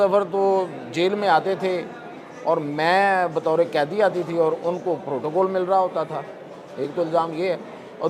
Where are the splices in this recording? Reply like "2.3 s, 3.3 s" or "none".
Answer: none